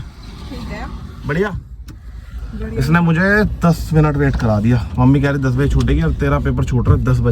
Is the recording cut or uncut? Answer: uncut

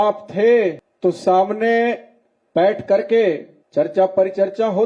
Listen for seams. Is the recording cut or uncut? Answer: cut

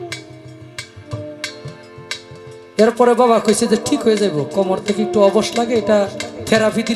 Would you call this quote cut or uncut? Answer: uncut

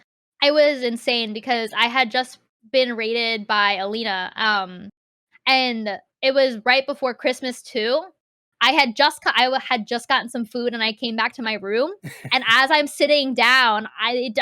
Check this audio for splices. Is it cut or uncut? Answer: cut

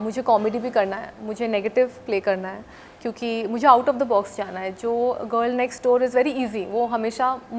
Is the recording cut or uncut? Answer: uncut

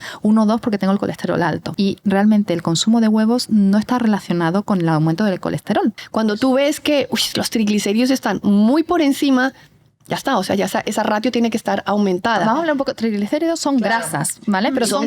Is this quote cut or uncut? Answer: cut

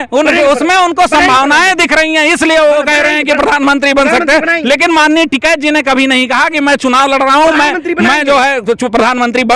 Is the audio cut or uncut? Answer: uncut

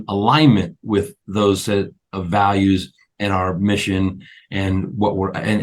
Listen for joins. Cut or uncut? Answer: uncut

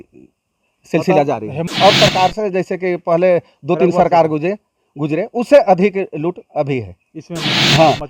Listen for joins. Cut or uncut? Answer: cut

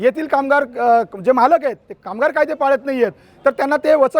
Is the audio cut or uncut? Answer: uncut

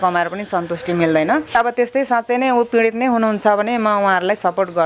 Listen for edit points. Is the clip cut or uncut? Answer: cut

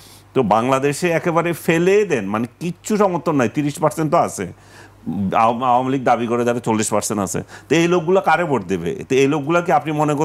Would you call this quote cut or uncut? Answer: uncut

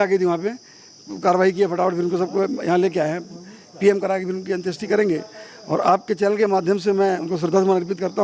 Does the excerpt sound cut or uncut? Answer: uncut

